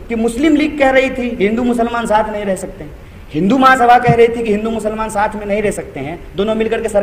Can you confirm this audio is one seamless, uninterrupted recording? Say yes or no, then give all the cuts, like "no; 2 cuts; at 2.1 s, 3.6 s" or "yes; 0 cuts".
yes; 0 cuts